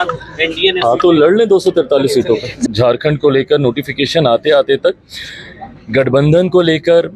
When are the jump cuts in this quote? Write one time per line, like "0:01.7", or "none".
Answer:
0:02.6